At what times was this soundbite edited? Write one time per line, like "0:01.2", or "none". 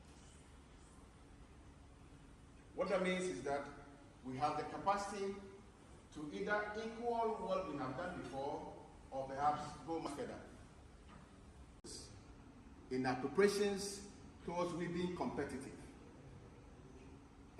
0:10.1
0:11.8

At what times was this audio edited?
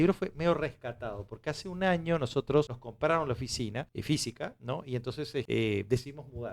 0:02.8
0:03.9
0:05.5

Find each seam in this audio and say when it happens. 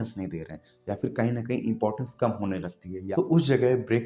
0:03.0

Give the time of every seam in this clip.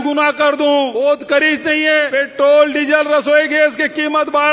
0:00.9
0:02.1

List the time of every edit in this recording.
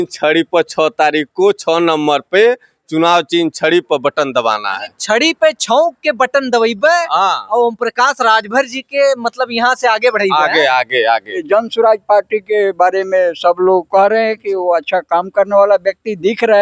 0:11.4

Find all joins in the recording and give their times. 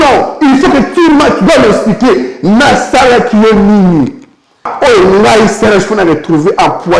0:04.7

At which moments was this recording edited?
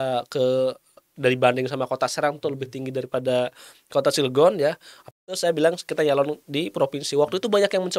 0:05.1

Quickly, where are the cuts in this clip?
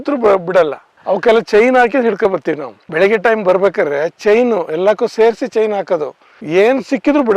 none

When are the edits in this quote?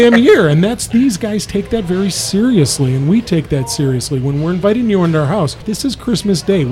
0:05.7

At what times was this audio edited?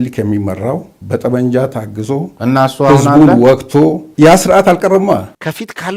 none

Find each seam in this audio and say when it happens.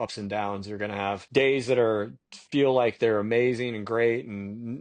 0:01.2

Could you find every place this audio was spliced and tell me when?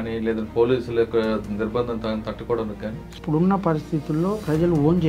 0:03.2

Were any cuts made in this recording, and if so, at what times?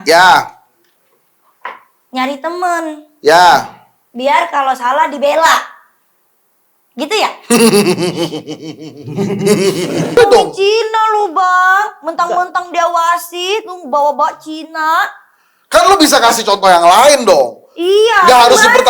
0:10.2

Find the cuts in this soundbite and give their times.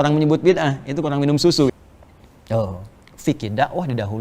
0:01.7

